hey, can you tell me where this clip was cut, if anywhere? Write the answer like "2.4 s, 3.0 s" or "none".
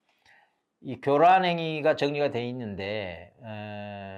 none